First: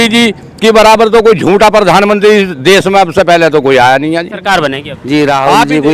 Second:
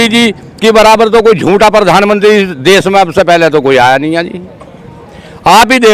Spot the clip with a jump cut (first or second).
first